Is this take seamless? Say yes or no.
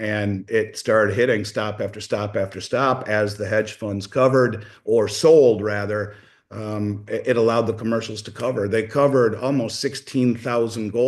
yes